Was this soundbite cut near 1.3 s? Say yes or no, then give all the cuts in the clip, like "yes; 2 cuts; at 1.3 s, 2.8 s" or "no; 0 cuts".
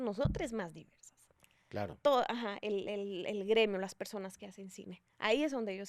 no; 0 cuts